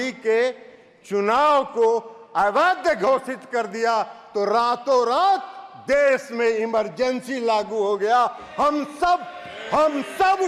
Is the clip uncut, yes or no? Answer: yes